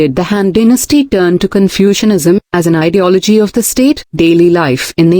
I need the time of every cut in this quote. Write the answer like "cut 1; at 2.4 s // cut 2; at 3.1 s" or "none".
cut 1; at 4.1 s

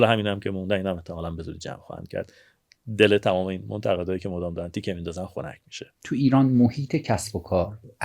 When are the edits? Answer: cut 1; at 6.1 s

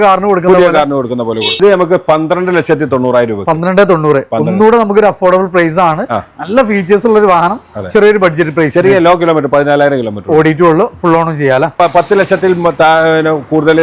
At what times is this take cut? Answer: cut 1; at 1.5 s // cut 2; at 11.8 s

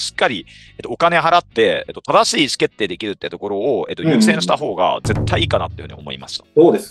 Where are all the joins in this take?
none

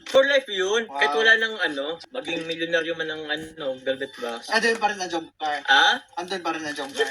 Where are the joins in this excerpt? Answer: cut 1; at 2.0 s // cut 2; at 4.4 s

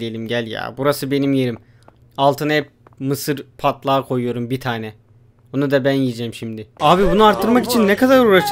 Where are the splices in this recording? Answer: cut 1; at 6.7 s

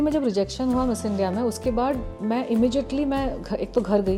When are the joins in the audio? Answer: none

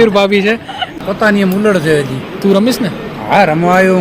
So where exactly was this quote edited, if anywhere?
cut 1; at 1.0 s

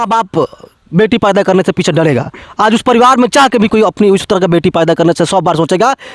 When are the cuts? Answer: none

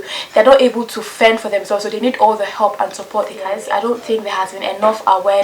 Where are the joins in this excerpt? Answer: cut 1; at 3.5 s

